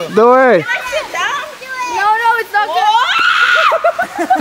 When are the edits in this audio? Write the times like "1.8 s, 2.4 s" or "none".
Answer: 1.5 s